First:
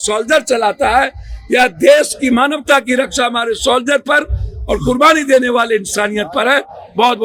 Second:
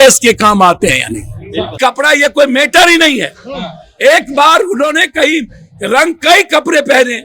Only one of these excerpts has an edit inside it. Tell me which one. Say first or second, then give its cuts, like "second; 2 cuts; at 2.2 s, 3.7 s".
second; 1 cut; at 1.7 s